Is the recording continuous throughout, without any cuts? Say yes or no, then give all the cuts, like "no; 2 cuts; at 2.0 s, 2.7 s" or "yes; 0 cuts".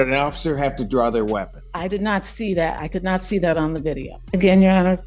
no; 2 cuts; at 1.6 s, 4.1 s